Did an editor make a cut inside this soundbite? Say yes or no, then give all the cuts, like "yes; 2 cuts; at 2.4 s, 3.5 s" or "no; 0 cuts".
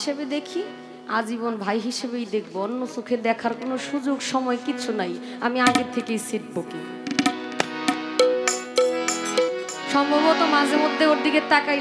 yes; 1 cut; at 9.7 s